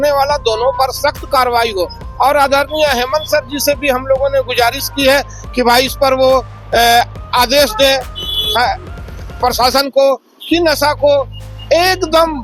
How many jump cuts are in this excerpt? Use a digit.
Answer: 0